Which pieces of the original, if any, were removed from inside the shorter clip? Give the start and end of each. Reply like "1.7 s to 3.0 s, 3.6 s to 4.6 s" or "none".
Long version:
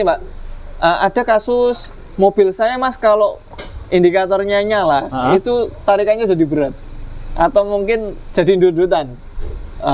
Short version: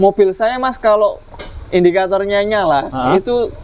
none